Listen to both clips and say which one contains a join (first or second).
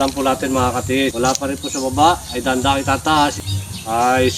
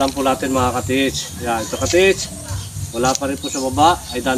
first